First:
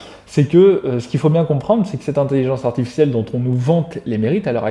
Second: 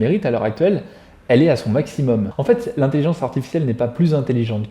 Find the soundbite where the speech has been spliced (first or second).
second